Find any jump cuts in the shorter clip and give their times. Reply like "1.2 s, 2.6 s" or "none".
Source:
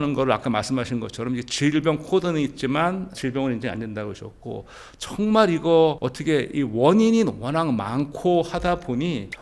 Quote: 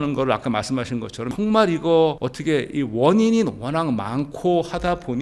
1.3 s